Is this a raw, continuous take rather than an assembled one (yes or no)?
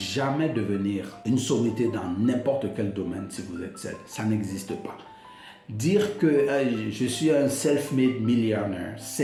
yes